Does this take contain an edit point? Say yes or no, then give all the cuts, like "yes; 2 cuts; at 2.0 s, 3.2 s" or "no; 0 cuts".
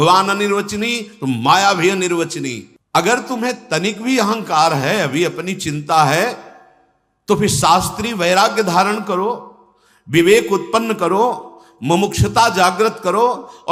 yes; 1 cut; at 2.7 s